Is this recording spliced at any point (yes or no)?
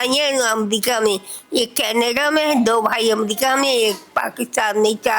no